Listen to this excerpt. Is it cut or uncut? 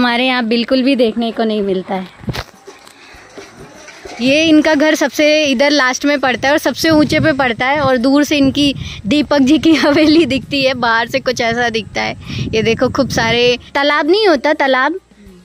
cut